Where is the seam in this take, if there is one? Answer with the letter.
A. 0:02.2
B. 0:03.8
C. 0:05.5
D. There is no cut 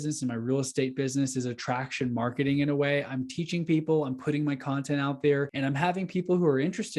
C